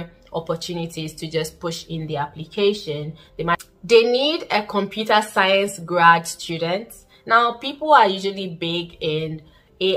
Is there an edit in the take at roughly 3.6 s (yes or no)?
yes